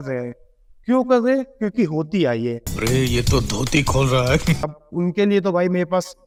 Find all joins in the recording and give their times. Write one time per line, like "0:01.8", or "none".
none